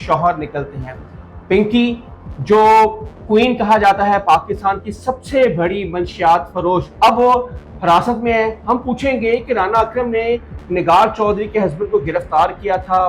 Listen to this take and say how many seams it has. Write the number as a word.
zero